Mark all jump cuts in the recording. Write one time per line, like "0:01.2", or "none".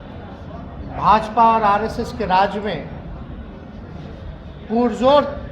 none